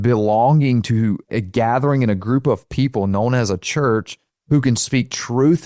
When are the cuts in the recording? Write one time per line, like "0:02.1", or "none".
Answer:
0:01.3
0:04.3